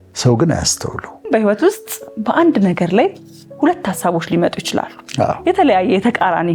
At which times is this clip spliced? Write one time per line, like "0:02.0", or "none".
0:01.3
0:05.4